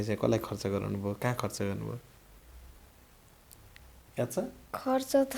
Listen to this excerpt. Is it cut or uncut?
uncut